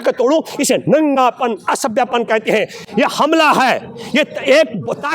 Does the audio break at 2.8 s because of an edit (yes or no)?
yes